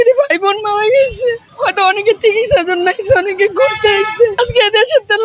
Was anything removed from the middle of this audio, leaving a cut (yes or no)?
yes